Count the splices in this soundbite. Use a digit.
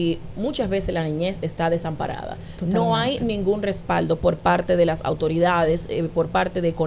0